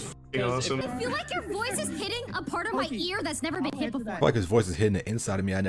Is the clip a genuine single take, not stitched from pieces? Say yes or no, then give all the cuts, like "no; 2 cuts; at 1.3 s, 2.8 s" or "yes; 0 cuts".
no; 2 cuts; at 0.8 s, 4.2 s